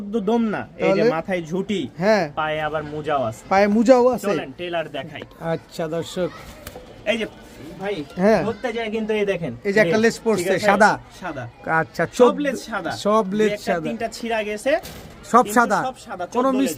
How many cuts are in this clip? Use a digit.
0